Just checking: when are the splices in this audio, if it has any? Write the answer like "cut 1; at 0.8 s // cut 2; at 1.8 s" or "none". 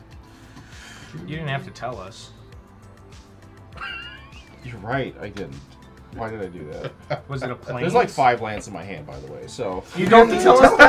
none

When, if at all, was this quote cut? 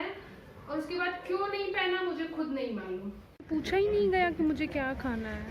cut 1; at 3.4 s

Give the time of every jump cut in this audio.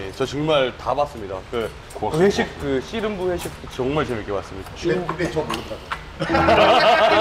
cut 1; at 1.8 s // cut 2; at 4.7 s

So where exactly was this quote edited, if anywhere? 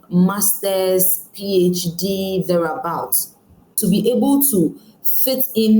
cut 1; at 3.8 s

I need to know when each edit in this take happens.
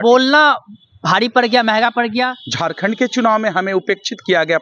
cut 1; at 2.4 s

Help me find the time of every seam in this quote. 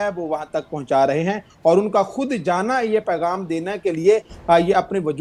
none

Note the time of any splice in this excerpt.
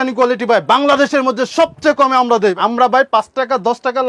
cut 1; at 2.6 s

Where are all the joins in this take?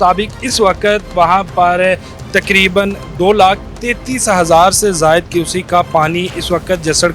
none

